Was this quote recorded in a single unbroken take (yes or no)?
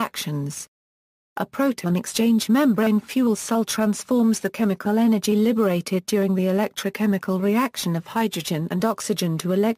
no